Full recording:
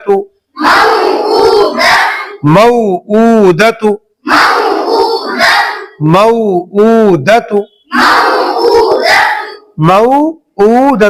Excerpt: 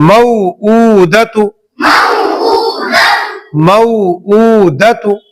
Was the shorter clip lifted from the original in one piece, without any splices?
yes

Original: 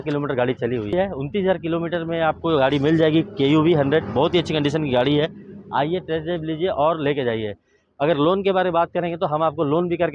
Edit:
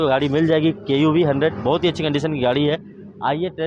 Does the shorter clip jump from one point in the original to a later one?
no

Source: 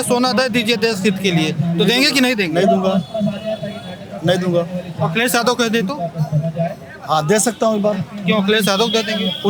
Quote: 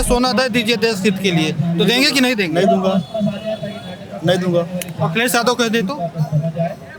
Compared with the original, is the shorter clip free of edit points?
yes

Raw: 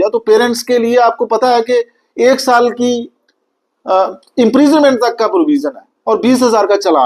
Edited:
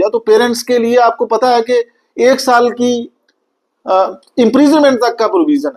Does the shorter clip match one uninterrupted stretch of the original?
yes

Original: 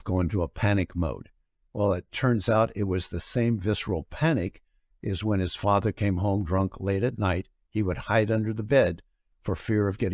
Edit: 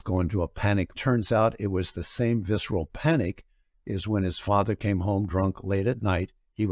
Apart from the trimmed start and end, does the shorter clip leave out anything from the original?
yes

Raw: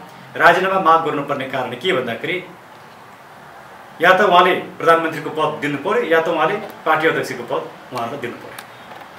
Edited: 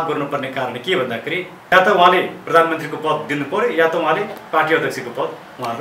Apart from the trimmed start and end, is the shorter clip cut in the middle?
yes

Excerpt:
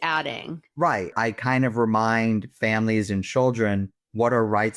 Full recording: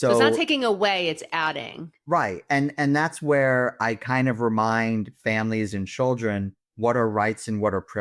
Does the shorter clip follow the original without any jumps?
no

